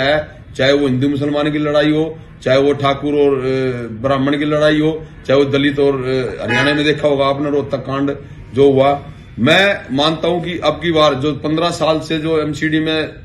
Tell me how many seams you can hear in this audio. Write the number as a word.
zero